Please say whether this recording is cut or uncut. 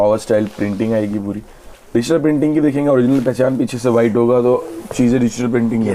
uncut